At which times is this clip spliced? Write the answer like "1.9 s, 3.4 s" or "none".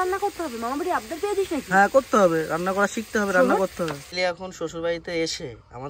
4.0 s